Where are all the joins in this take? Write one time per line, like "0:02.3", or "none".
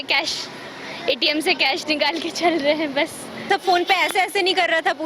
0:03.4